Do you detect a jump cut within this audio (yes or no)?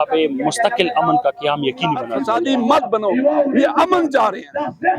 yes